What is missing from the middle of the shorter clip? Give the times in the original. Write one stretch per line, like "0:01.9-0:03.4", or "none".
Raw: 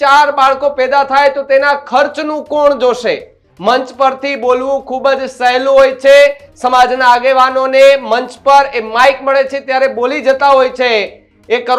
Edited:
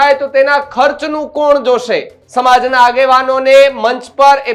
0:03.4-0:06.5